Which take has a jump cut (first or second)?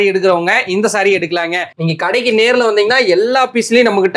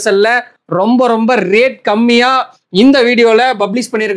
first